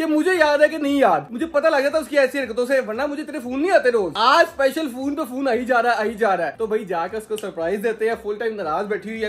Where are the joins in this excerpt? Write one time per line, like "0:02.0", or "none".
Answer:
none